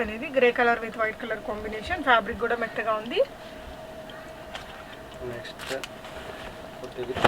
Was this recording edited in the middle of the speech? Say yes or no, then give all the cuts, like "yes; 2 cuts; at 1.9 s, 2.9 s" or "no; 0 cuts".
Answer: no; 0 cuts